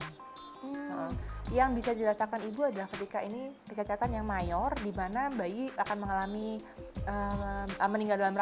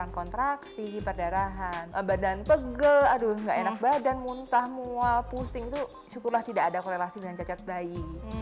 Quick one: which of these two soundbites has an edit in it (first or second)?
second